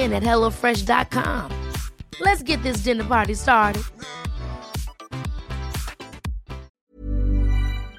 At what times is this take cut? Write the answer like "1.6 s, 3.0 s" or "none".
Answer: 6.7 s